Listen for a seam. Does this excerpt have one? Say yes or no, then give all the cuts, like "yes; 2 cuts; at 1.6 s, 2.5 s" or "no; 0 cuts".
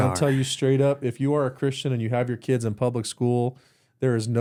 no; 0 cuts